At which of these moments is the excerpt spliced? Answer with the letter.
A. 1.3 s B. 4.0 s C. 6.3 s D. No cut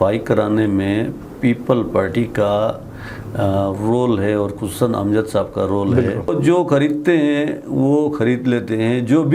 C